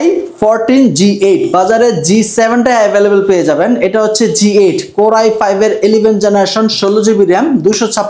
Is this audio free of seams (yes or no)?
yes